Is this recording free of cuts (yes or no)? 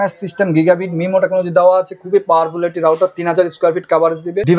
yes